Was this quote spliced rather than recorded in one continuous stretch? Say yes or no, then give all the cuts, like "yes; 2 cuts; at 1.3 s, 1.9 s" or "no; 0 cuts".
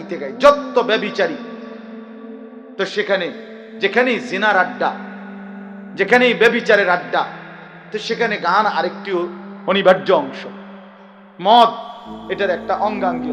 no; 0 cuts